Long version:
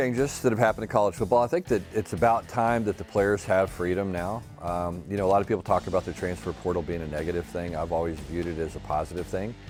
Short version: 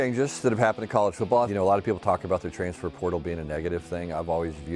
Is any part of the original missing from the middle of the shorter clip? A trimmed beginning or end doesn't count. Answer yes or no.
yes